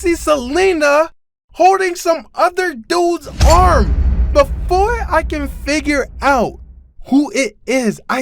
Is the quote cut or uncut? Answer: cut